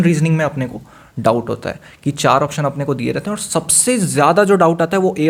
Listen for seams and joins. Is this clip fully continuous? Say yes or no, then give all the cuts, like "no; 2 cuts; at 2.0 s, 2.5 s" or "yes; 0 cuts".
yes; 0 cuts